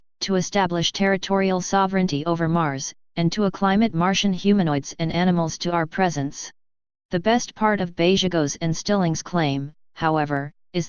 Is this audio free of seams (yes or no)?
no